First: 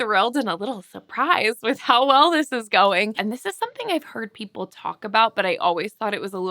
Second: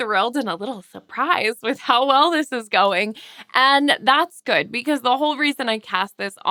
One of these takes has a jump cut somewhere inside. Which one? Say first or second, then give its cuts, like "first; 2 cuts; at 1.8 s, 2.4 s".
first; 1 cut; at 3.2 s